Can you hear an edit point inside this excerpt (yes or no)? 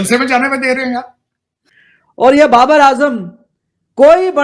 yes